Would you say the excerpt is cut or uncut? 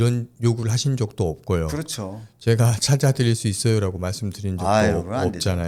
uncut